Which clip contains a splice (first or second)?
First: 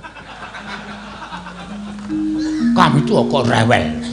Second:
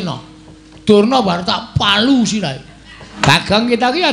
second